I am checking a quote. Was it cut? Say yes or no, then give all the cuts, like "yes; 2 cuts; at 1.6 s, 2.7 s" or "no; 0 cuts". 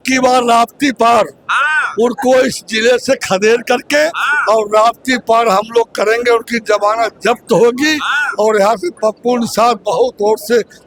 no; 0 cuts